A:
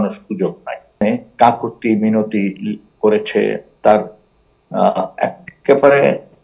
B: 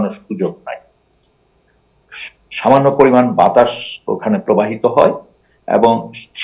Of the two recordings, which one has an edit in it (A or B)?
A